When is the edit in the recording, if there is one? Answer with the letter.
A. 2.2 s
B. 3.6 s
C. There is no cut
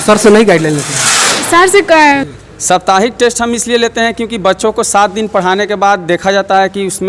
A